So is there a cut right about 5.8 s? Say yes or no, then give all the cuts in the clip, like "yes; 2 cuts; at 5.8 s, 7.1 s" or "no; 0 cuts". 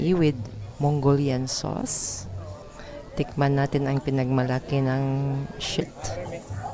yes; 1 cut; at 5.8 s